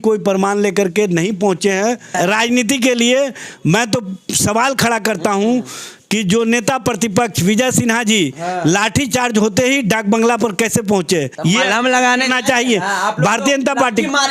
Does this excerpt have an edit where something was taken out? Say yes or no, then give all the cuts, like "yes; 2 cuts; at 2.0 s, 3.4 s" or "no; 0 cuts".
yes; 2 cuts; at 2.1 s, 11.3 s